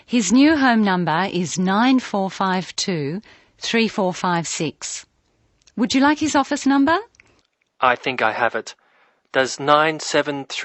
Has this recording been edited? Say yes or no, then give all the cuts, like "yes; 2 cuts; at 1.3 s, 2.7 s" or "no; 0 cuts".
no; 0 cuts